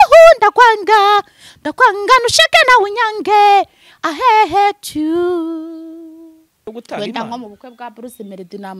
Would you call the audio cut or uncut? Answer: cut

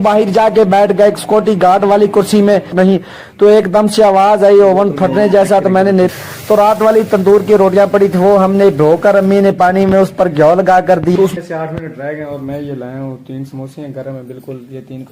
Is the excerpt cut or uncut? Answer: cut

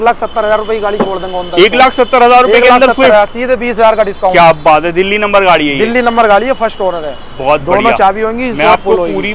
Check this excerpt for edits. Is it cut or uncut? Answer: uncut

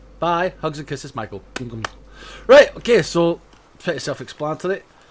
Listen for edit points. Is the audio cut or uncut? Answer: uncut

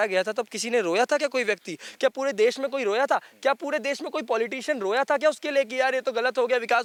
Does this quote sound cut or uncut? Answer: uncut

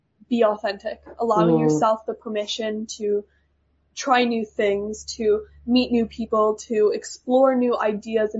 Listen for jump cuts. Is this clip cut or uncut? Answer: uncut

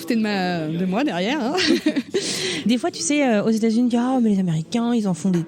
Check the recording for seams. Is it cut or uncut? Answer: cut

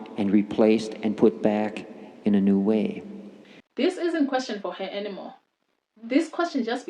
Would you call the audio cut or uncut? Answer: cut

